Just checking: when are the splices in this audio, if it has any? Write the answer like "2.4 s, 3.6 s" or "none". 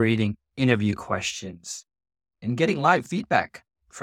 2.4 s